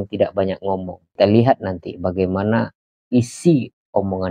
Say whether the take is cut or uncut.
cut